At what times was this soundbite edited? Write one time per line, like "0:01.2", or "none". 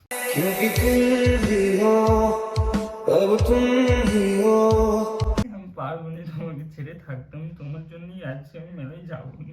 0:05.6